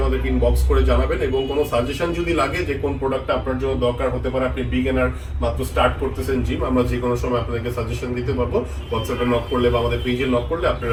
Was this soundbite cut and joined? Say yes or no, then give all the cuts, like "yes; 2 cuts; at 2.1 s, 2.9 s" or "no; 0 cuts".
no; 0 cuts